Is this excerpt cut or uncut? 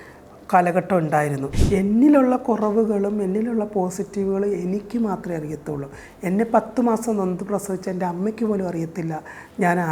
cut